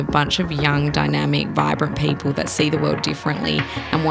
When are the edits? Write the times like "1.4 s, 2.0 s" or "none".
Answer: none